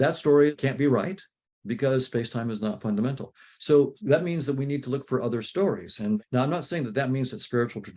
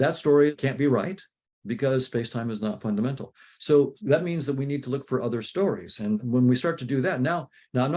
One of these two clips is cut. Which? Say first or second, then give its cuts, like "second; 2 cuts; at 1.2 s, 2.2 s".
first; 1 cut; at 6.2 s